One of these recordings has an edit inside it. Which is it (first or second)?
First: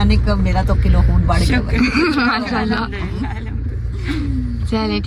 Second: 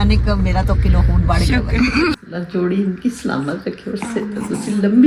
second